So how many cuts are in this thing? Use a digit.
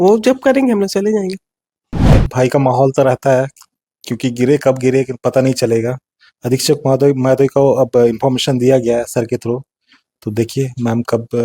1